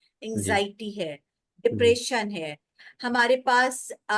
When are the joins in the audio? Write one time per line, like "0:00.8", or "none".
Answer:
none

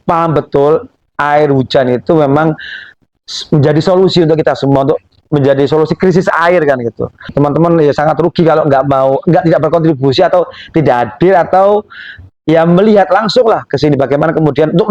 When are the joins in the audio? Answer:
0:07.3

